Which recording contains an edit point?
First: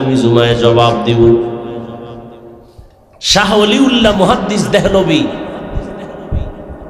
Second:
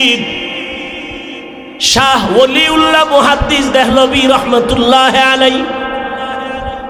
first; 1 cut; at 2.6 s

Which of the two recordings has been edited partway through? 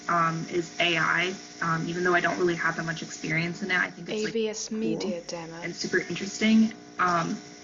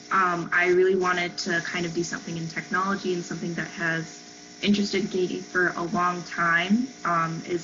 first; 2 cuts; at 4.0 s, 5.6 s

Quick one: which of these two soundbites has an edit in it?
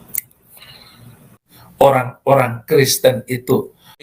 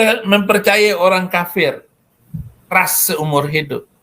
second; 1 cut; at 2.7 s

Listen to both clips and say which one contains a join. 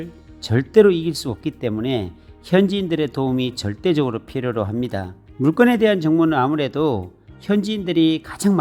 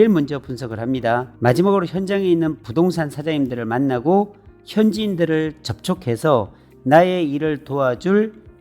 second; 1 cut; at 1.3 s

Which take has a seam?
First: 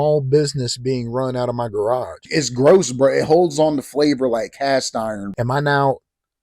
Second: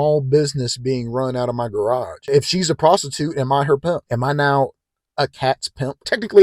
first; 2 cuts; at 2.2 s, 5.3 s

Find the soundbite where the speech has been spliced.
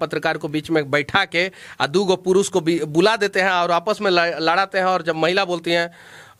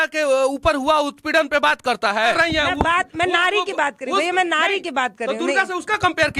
second; 1 cut; at 2.3 s

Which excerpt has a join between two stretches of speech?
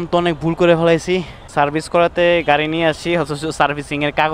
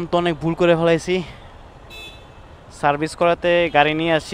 first; 1 cut; at 1.4 s

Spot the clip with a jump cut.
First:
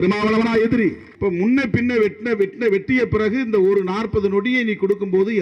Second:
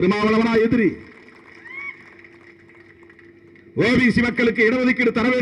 first; 1 cut; at 1.1 s

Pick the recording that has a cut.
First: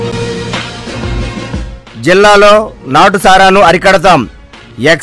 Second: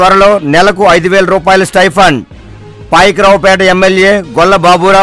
first; 1 cut; at 1.7 s

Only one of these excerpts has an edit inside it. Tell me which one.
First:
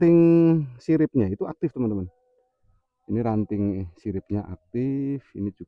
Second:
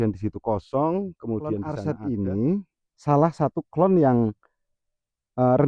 second; 1 cut; at 1.8 s

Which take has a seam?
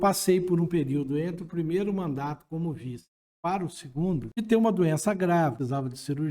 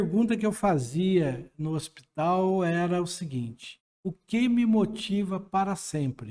first; 2 cuts; at 4.3 s, 5.6 s

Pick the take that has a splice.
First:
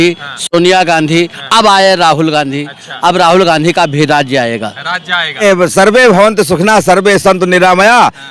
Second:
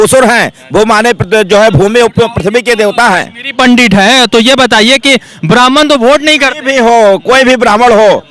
first; 1 cut; at 5.4 s

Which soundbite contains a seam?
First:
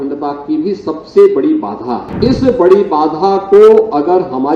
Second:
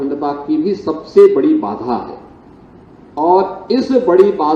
first; 1 cut; at 2.1 s

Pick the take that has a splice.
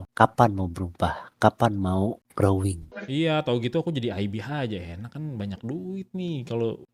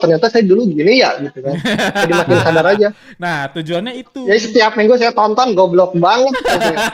first; 1 cut; at 3.0 s

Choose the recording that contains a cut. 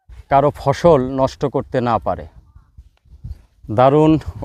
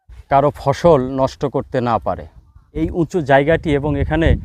second; 1 cut; at 2.8 s

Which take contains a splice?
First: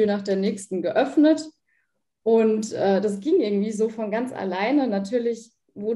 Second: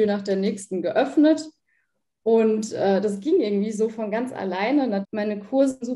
second; 1 cut; at 5.0 s

